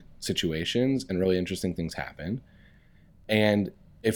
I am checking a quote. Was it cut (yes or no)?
no